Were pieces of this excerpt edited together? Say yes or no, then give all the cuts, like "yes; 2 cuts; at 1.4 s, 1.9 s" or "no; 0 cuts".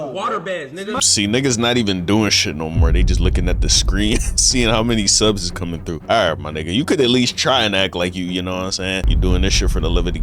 yes; 2 cuts; at 6.0 s, 9.1 s